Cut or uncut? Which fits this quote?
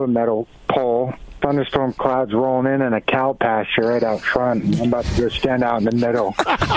uncut